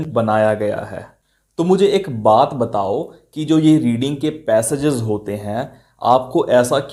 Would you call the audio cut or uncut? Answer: uncut